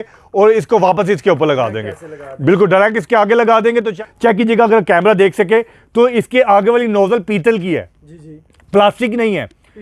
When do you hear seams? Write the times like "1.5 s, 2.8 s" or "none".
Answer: 3.9 s